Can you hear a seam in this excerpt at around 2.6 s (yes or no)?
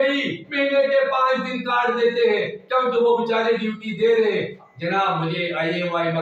no